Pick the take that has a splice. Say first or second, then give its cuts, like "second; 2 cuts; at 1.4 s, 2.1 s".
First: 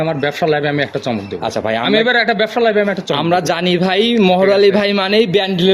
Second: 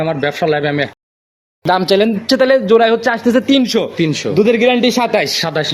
second; 1 cut; at 1.4 s